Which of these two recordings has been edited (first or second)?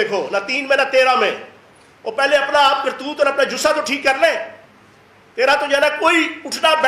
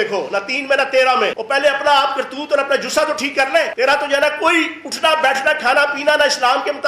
second